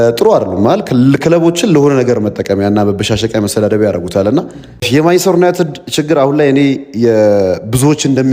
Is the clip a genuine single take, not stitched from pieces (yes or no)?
no